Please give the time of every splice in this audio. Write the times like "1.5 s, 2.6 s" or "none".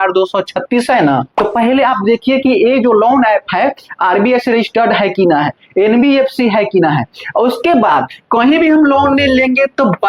1.3 s